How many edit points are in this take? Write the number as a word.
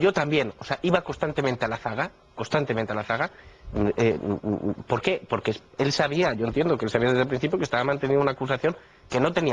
one